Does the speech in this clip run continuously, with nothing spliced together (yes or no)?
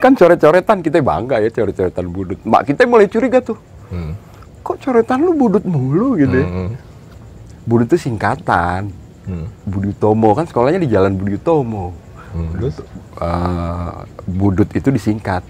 yes